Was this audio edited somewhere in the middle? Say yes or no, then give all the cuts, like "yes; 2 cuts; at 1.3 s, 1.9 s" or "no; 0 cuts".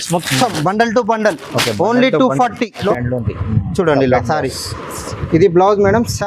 yes; 1 cut; at 2.8 s